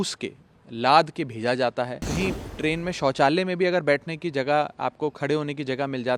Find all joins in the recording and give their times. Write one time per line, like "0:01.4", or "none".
0:02.1